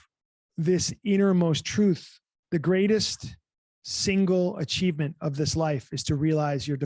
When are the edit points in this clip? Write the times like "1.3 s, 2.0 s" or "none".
2.3 s

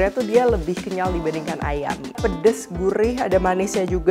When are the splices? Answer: 2.2 s

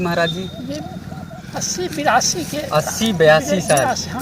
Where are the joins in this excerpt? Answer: 1.3 s

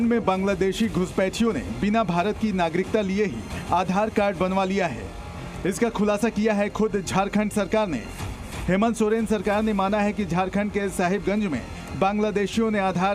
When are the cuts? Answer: none

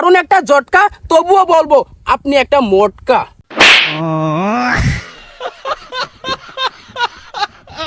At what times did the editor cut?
3.5 s

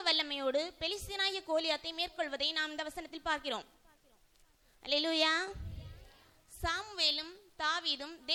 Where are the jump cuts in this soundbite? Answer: none

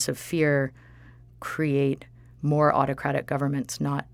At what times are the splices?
none

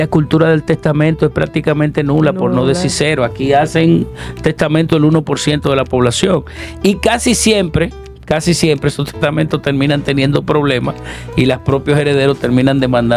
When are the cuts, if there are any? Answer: none

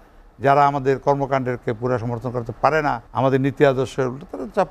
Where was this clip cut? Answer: 3.1 s

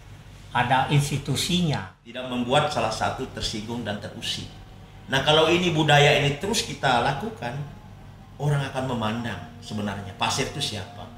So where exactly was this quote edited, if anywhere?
2.3 s

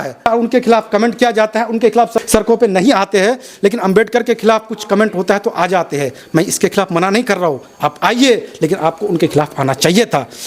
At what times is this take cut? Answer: none

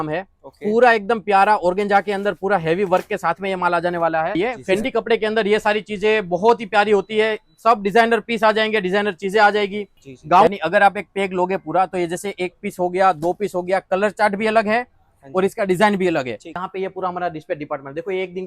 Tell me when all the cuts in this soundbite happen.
4.4 s, 10.5 s, 16.6 s

